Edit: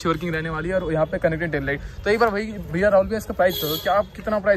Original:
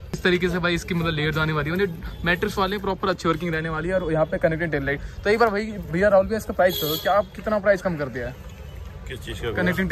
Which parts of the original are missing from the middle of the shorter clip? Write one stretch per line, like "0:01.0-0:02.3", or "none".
none